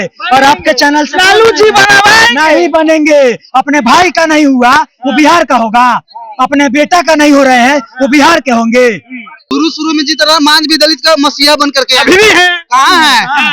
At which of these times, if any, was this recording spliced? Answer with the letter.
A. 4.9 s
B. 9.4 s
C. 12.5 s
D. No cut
B